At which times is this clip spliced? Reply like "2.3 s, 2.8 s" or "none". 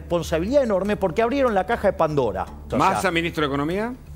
2.6 s